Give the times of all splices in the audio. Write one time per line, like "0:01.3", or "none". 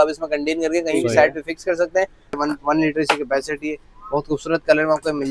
0:02.4

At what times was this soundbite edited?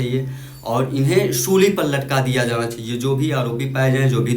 none

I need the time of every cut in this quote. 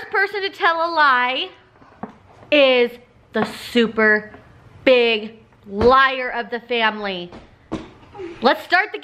none

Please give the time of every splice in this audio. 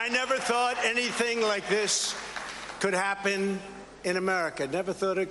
none

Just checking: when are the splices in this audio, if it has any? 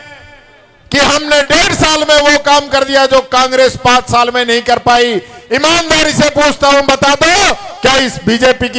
none

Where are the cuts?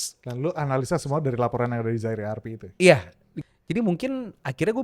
0:03.3

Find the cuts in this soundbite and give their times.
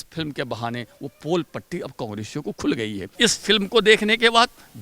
0:03.0

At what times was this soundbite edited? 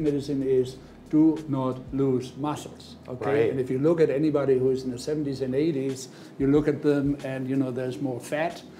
none

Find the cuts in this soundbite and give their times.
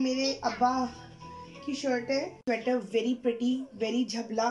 0:02.4

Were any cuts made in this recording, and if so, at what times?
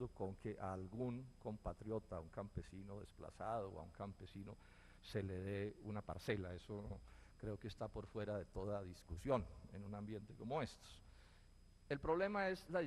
0:11.5

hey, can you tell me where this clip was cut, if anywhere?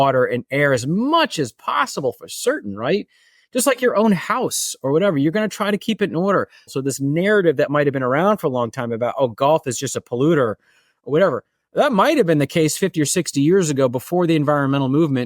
0:06.7

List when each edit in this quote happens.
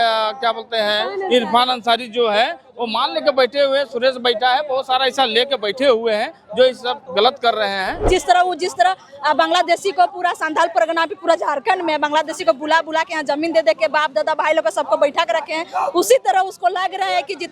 0:08.0

